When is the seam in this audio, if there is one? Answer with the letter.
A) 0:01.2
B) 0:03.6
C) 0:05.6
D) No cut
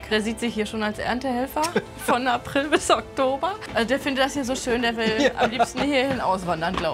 B